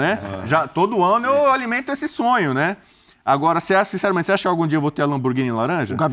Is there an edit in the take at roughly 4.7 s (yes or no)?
no